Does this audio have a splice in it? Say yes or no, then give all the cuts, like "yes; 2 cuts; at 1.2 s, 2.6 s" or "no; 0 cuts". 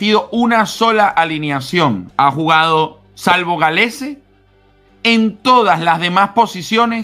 yes; 1 cut; at 2.0 s